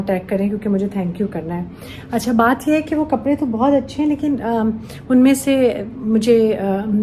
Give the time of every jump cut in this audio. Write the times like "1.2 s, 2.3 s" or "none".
none